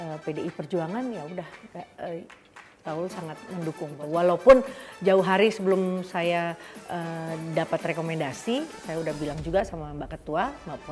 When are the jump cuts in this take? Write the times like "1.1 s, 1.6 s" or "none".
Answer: 4.0 s

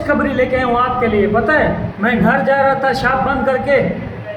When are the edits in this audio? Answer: none

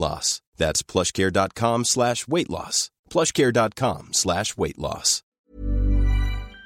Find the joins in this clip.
5.5 s

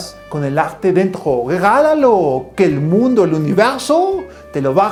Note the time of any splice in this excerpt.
none

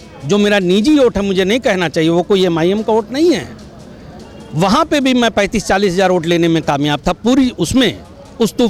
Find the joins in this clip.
none

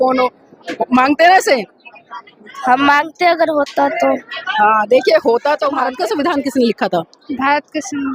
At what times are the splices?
5.9 s

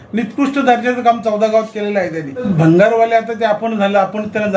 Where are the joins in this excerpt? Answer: 2.4 s

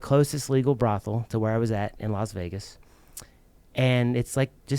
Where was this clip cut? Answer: none

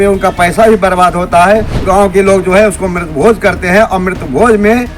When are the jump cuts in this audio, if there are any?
1.7 s

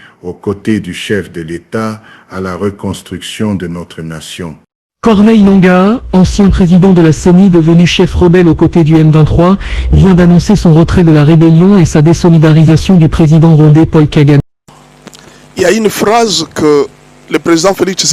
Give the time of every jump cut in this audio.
14.4 s

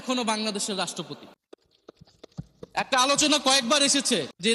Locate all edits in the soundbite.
none

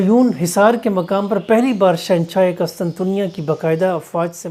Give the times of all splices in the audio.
none

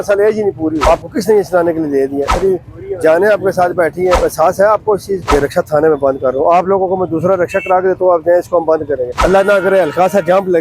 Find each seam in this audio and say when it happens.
0.8 s, 2.4 s, 4.2 s, 5.3 s, 9.1 s

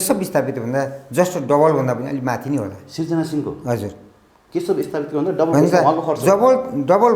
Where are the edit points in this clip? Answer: none

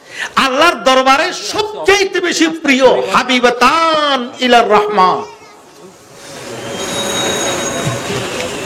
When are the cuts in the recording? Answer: none

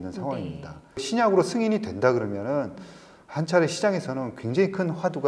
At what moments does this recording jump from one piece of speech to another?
1.1 s

